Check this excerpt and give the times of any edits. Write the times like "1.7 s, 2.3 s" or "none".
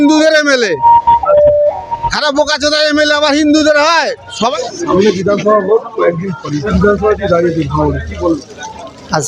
4.5 s, 6.7 s